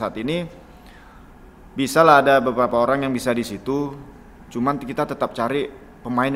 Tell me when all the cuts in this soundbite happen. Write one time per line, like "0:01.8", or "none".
none